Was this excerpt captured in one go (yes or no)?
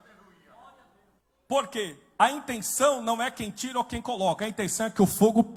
yes